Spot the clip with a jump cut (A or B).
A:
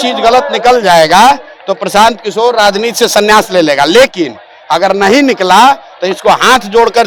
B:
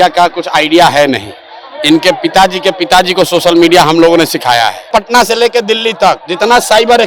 B